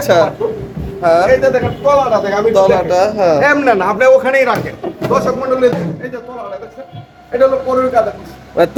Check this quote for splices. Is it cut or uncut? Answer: uncut